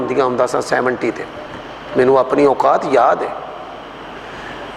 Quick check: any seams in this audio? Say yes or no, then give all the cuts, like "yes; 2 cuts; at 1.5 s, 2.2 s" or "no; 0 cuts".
no; 0 cuts